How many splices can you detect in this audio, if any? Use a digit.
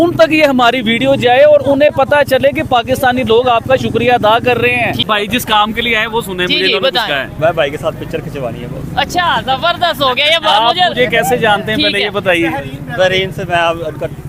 1